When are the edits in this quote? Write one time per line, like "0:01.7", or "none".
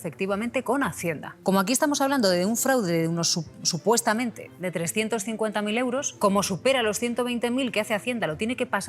0:01.3
0:06.1